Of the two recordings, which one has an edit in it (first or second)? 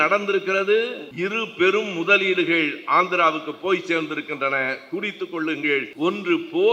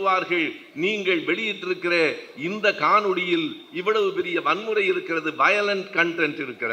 first